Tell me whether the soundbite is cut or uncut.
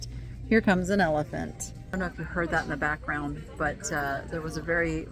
cut